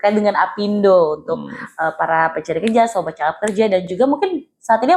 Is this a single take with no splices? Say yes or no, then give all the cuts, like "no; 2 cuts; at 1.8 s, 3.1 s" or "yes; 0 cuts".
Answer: yes; 0 cuts